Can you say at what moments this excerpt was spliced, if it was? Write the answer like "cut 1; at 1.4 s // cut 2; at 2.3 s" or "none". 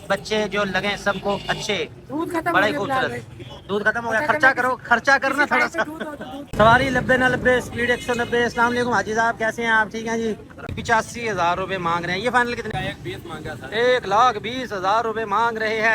cut 1; at 6.4 s // cut 2; at 10.7 s // cut 3; at 12.7 s